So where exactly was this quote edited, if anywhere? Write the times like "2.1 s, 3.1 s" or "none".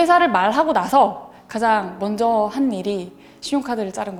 none